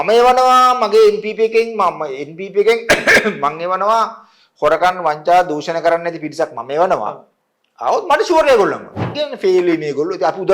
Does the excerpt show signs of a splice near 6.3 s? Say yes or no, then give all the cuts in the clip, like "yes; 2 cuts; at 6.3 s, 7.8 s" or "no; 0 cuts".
no; 1 cut; at 9.1 s